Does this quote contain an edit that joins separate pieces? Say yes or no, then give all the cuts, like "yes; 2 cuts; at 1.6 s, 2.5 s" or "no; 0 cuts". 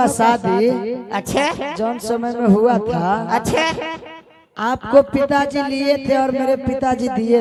no; 0 cuts